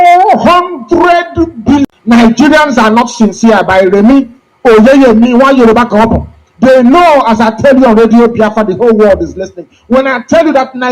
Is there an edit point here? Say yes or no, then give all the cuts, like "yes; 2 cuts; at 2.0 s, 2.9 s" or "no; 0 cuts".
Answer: yes; 1 cut; at 1.8 s